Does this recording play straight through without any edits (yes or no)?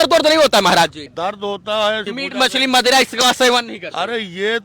no